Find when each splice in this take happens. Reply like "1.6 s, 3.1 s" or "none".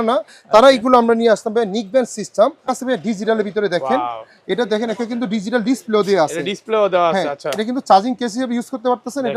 2.7 s